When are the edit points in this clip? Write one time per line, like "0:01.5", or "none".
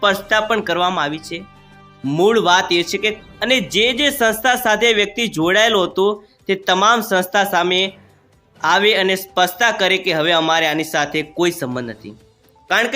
0:03.2